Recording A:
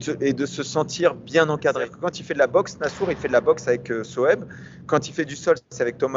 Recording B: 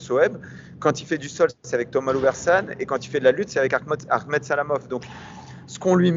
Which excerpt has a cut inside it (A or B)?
A